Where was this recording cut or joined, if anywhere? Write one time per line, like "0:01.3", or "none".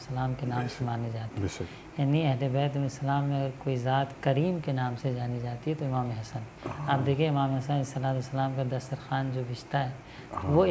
none